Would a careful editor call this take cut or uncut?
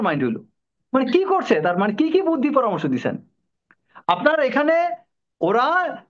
uncut